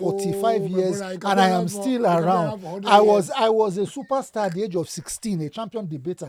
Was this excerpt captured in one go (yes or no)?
yes